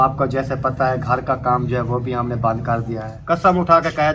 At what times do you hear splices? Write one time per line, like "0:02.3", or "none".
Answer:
0:03.1